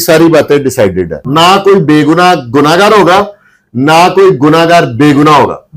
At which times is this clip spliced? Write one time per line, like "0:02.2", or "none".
0:01.2

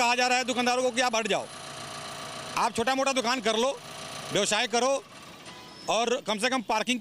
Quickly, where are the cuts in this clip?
none

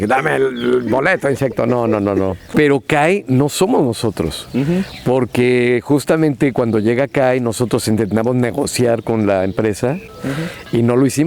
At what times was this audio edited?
0:02.5
0:10.0

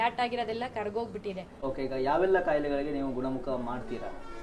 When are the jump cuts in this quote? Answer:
0:01.5

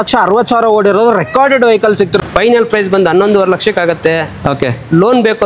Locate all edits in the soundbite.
0:02.2

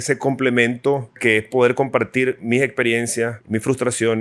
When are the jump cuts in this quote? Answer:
0:01.2
0:03.4

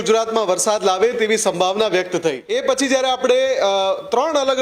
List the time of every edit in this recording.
0:02.4

